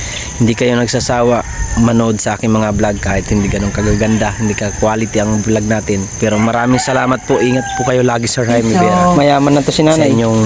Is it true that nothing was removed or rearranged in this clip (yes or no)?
no